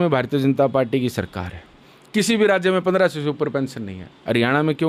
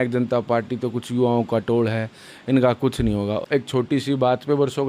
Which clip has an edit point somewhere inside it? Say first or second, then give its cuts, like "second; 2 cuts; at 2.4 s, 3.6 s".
second; 1 cut; at 3.4 s